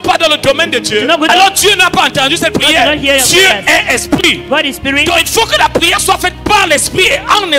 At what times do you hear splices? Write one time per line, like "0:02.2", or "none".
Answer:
none